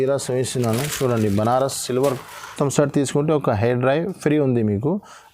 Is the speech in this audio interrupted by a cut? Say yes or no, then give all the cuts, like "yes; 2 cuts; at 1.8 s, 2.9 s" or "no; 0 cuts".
yes; 1 cut; at 2.5 s